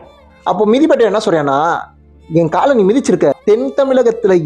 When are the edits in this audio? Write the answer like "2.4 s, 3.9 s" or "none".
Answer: 3.4 s